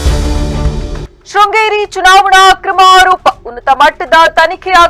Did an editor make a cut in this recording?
yes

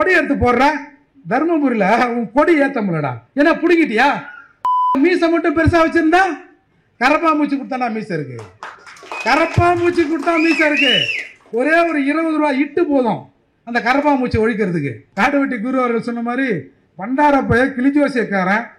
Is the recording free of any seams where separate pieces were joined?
no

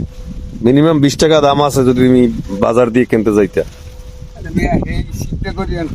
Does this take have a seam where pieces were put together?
no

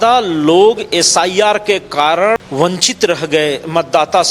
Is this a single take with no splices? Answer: no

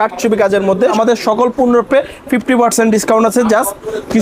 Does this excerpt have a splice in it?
yes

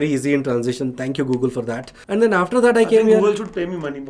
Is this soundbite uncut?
yes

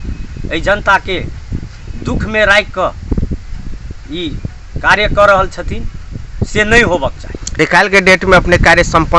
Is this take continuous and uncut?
no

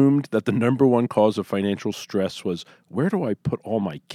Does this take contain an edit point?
no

